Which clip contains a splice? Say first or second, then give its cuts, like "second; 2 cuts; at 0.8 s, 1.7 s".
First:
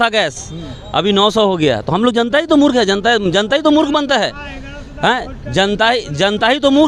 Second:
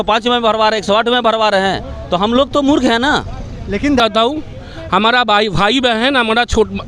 second; 1 cut; at 4.0 s